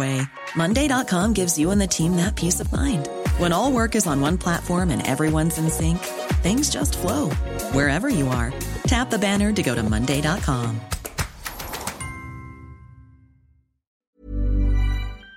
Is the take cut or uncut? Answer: cut